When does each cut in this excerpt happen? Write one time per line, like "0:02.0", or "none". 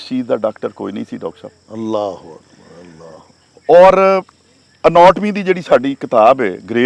none